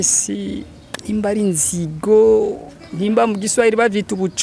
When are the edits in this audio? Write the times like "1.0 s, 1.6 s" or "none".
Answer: none